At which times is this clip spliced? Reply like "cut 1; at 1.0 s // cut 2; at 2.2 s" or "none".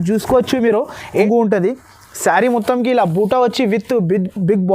cut 1; at 1.1 s